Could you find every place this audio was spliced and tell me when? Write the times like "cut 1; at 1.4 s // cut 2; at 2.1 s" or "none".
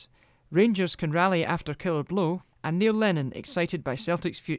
cut 1; at 2.5 s